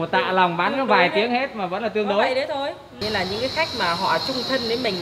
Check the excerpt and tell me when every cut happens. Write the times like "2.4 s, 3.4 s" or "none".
3.0 s